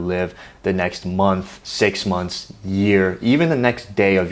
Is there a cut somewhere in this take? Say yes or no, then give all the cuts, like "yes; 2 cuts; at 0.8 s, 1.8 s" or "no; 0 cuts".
yes; 1 cut; at 1.6 s